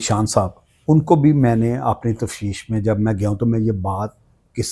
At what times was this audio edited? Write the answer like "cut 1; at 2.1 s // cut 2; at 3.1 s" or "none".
none